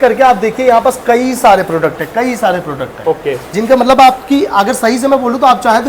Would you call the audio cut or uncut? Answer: uncut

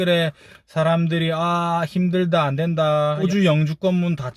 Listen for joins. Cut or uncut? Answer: cut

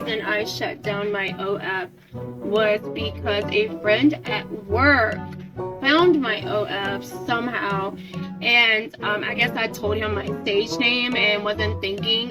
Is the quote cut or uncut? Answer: uncut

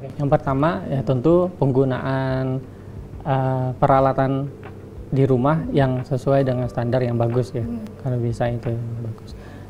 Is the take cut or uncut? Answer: uncut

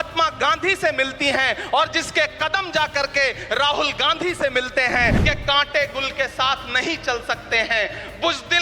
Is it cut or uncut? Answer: cut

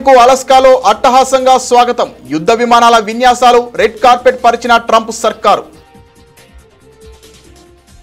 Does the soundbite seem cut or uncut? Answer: uncut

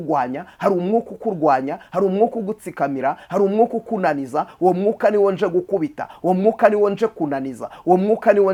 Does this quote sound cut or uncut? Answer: uncut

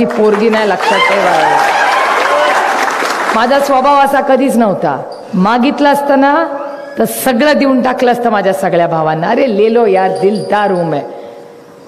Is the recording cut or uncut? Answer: uncut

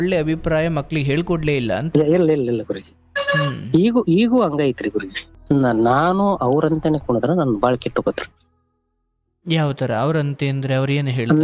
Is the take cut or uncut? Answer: cut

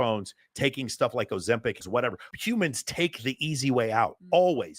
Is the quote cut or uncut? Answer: cut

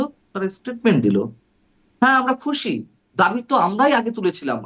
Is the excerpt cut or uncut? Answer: uncut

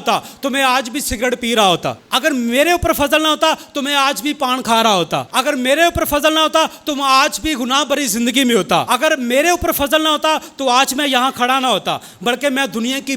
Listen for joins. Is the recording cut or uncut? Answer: cut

